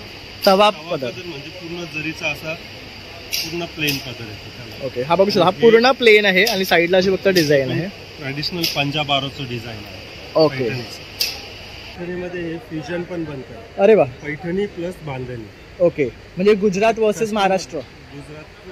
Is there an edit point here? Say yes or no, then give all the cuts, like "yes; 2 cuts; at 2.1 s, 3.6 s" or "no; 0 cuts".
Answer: yes; 1 cut; at 11.9 s